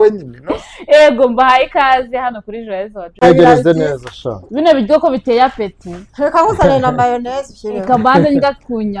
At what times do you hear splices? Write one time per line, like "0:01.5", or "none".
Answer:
0:03.2